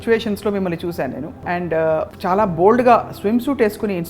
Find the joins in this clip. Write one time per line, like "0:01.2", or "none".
0:01.3
0:02.1